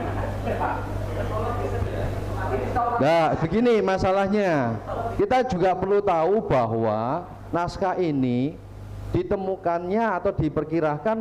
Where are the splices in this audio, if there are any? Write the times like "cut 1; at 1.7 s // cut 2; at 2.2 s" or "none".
none